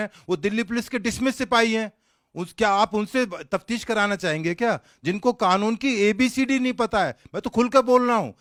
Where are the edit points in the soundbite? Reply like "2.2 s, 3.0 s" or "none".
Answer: none